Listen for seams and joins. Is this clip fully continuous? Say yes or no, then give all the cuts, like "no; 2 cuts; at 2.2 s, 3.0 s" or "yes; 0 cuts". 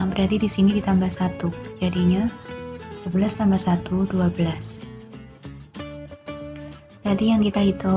yes; 0 cuts